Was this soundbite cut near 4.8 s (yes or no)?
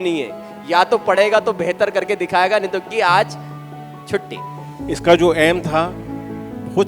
yes